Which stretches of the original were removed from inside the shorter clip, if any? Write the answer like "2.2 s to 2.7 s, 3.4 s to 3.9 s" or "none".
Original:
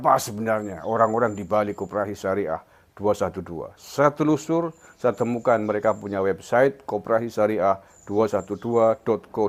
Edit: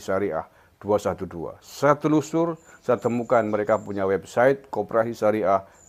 none